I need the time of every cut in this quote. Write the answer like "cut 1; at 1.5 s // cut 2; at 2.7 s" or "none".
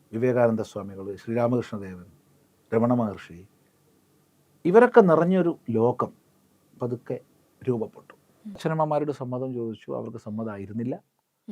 cut 1; at 8.6 s

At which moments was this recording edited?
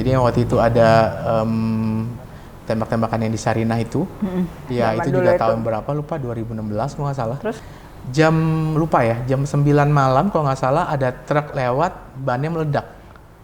cut 1; at 4.7 s // cut 2; at 7.6 s

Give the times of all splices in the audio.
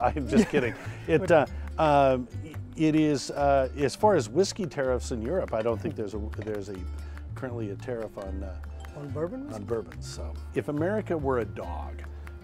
cut 1; at 10.5 s

